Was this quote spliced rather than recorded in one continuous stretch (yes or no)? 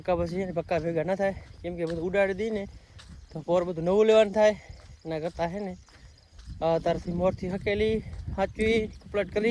no